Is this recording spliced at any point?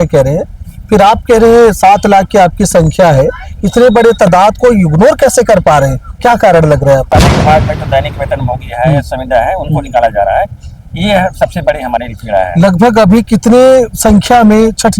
yes; 1 cut; at 7.1 s

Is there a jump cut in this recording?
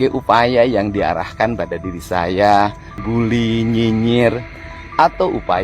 yes; 1 cut; at 3.0 s

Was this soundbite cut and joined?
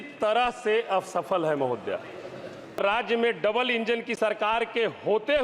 yes; 1 cut; at 2.8 s

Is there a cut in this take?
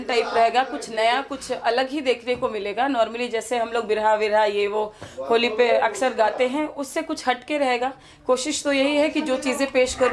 no; 0 cuts

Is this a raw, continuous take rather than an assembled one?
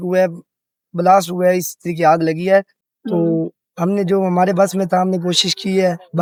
yes; 0 cuts

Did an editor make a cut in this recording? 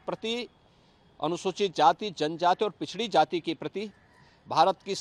no; 0 cuts

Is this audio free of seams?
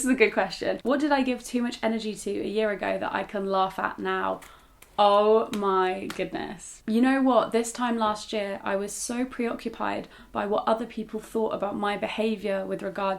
yes; 0 cuts

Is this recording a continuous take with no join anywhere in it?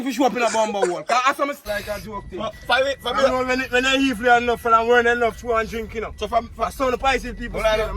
no; 1 cut; at 1.6 s

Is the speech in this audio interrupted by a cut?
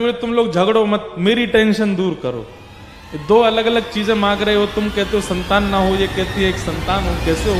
no; 0 cuts

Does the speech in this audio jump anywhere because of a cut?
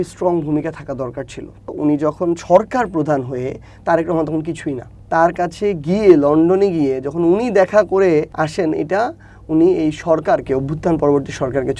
yes; 3 cuts; at 1.7 s, 4.9 s, 8.3 s

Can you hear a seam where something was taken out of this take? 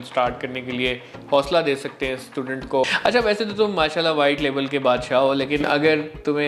yes; 1 cut; at 2.8 s

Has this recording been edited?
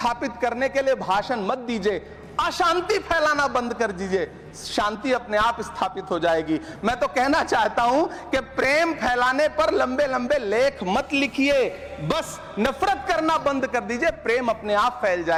no; 0 cuts

